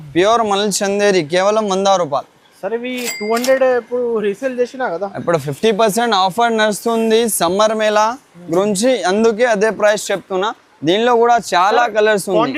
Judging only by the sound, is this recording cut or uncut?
uncut